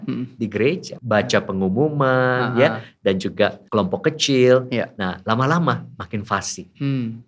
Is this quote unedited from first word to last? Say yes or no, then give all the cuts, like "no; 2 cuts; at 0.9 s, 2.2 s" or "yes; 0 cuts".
no; 2 cuts; at 0.9 s, 3.6 s